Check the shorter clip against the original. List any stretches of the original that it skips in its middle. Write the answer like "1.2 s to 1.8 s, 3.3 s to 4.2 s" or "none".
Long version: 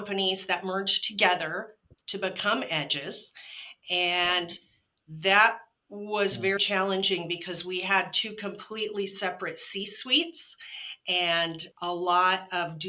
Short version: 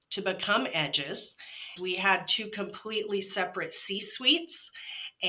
3.7 s to 7.5 s